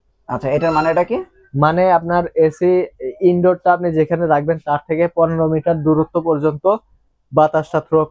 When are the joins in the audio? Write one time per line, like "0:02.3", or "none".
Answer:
none